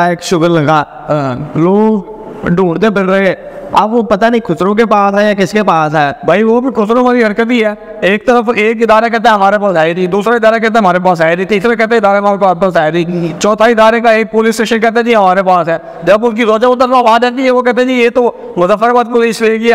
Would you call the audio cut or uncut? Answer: uncut